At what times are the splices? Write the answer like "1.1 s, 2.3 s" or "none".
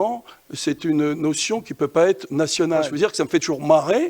2.9 s